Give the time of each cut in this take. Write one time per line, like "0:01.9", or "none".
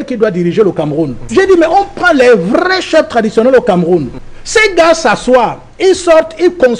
0:01.2
0:04.2